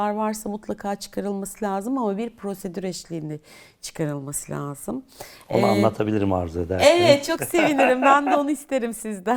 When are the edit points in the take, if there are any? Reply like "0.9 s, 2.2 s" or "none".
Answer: none